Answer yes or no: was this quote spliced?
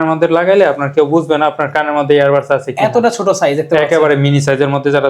no